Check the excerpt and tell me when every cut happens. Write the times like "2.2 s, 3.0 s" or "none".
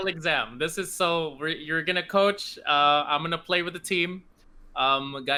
none